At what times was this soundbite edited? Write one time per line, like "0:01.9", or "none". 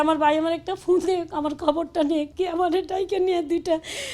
0:02.3

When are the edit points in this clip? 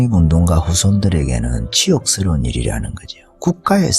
none

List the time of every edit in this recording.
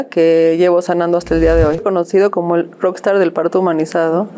0:01.8

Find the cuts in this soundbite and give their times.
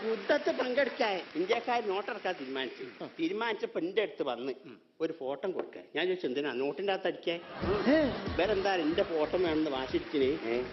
0:01.3
0:08.3

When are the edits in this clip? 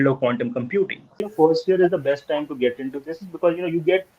0:01.3

